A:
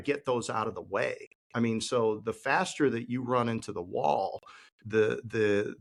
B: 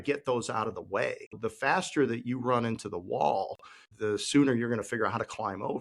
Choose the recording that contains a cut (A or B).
B